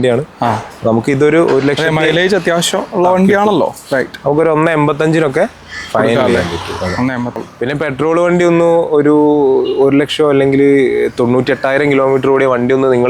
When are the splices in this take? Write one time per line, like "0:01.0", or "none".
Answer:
0:07.4